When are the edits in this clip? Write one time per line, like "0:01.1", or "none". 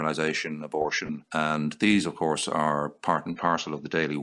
0:01.2